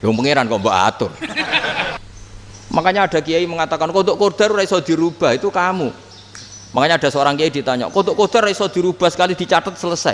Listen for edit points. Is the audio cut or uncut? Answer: cut